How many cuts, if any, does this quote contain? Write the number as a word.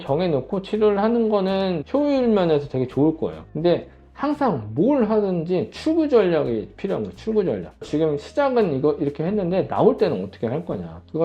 three